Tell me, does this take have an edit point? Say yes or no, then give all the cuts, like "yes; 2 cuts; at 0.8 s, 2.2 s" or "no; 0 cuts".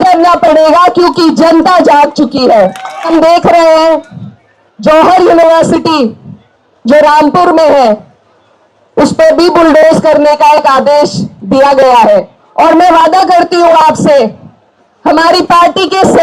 yes; 2 cuts; at 3.1 s, 12.4 s